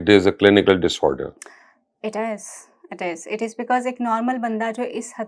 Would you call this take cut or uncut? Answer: uncut